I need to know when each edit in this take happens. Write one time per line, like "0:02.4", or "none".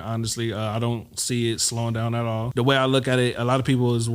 0:02.5